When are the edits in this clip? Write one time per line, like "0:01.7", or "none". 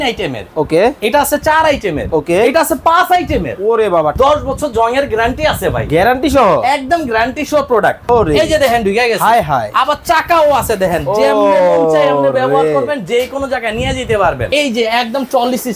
0:04.1
0:08.0
0:14.5